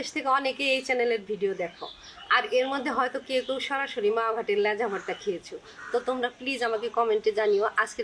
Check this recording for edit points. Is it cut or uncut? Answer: uncut